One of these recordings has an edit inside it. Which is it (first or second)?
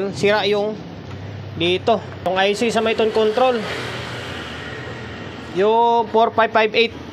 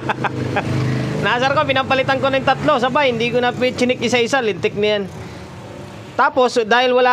first